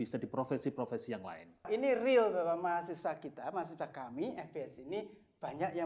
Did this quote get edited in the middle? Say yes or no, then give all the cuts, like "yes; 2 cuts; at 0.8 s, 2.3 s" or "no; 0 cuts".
yes; 1 cut; at 1.7 s